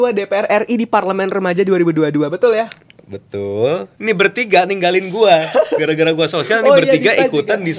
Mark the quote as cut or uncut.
cut